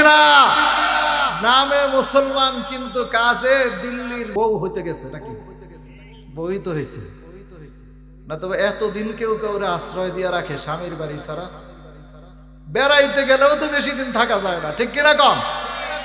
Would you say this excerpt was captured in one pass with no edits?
no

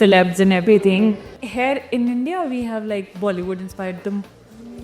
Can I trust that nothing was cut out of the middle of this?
no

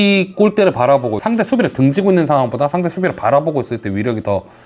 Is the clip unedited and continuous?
no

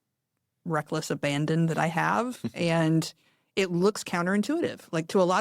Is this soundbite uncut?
yes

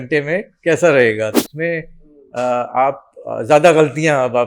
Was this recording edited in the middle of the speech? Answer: yes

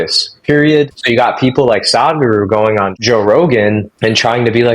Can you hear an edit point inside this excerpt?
yes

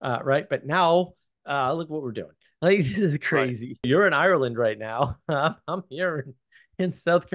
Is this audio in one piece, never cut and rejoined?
no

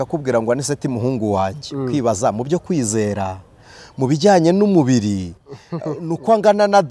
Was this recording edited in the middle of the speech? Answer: no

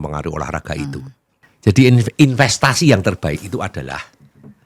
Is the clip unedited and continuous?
no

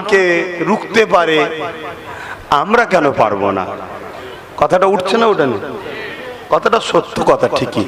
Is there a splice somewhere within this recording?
no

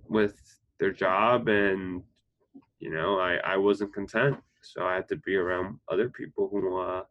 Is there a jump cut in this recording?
no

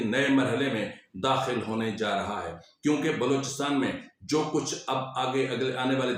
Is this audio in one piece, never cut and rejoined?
yes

